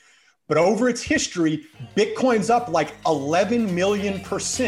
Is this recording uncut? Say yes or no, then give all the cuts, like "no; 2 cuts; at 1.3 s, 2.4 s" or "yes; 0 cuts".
yes; 0 cuts